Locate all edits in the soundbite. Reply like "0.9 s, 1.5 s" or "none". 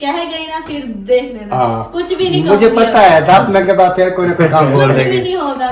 none